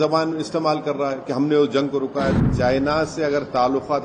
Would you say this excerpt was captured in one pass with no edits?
no; 1 cut; at 2.4 s

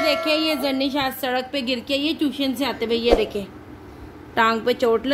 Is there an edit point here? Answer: no; 0 cuts

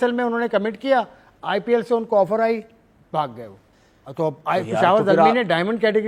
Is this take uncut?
yes; 0 cuts

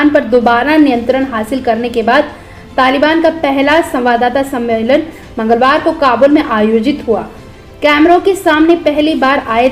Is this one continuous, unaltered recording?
yes; 0 cuts

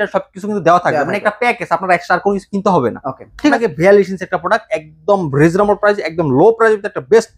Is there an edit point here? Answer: yes; 1 cut; at 3.5 s

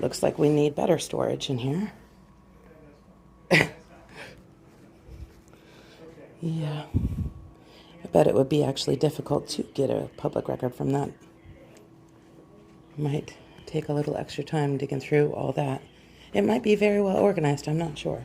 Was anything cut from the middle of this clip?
no; 0 cuts

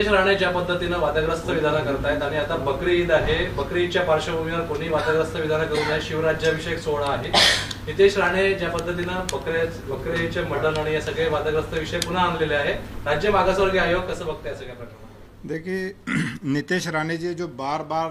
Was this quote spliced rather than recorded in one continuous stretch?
no; 0 cuts

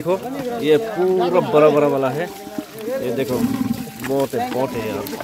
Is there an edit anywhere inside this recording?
no; 0 cuts

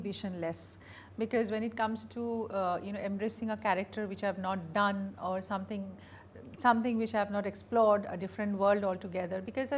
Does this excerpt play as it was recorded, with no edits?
yes; 0 cuts

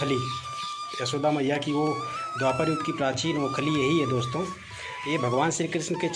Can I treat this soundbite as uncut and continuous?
yes; 0 cuts

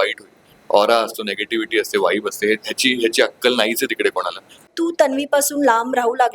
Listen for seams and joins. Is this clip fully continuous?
no; 1 cut; at 4.7 s

